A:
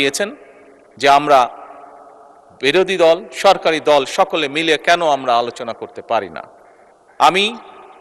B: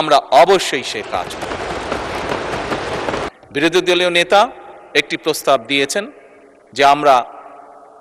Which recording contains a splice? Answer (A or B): B